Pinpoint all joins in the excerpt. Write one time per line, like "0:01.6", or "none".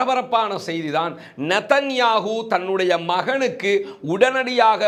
none